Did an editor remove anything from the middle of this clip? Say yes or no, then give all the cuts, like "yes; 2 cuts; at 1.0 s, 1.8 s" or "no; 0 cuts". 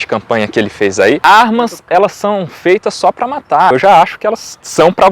yes; 2 cuts; at 1.2 s, 3.7 s